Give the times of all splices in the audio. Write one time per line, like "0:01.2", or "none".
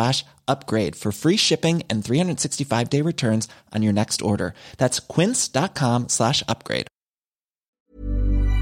0:07.7